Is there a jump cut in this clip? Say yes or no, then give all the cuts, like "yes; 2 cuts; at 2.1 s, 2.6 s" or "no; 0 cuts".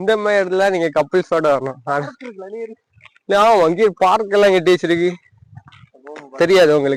no; 0 cuts